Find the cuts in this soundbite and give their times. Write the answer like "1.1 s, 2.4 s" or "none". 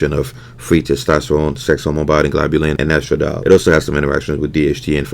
3.1 s